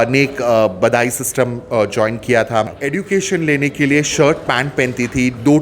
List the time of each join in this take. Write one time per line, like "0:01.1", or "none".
0:02.7